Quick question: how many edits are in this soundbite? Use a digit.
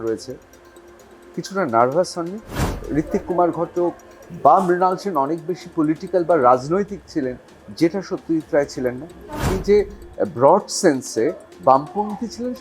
2